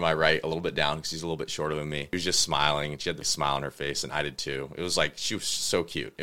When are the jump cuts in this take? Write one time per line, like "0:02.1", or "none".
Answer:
0:02.1
0:03.3